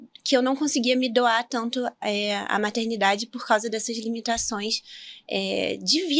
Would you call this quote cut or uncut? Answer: uncut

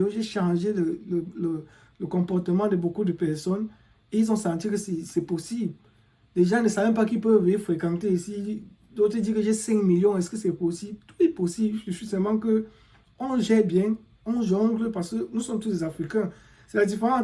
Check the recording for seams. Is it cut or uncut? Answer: uncut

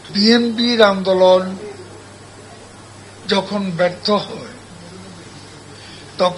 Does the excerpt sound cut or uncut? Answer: uncut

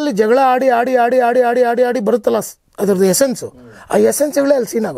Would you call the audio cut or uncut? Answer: uncut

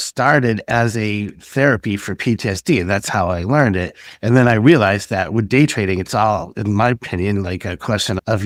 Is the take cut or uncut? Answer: uncut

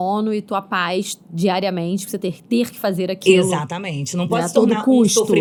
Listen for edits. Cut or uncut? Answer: uncut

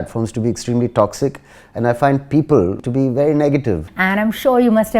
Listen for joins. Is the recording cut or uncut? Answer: cut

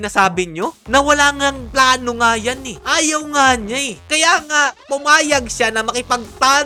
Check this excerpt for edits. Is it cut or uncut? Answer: uncut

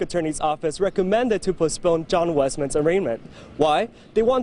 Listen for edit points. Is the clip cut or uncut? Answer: uncut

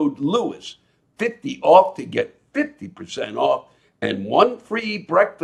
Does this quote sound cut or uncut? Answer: uncut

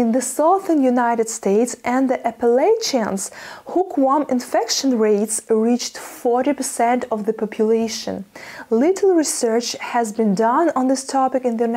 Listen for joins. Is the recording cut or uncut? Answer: uncut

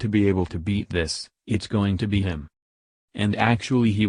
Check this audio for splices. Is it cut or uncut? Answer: cut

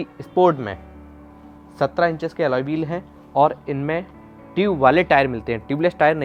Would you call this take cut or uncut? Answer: uncut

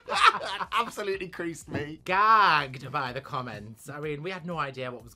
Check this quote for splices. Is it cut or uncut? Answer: cut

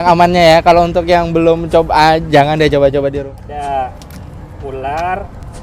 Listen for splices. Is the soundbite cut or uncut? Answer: cut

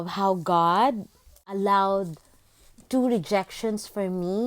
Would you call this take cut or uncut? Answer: cut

